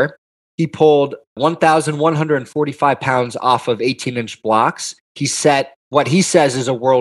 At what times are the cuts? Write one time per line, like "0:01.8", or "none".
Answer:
0:01.4
0:05.7